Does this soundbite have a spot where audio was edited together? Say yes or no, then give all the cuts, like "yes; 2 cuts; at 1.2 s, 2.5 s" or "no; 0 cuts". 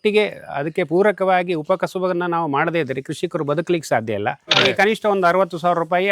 yes; 1 cut; at 4.7 s